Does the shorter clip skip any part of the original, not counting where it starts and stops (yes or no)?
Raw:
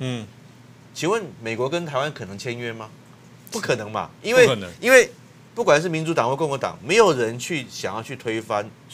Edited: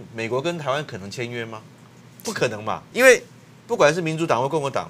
yes